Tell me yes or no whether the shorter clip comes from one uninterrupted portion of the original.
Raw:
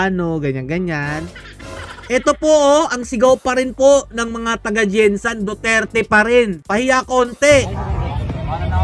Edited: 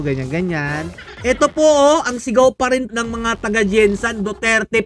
no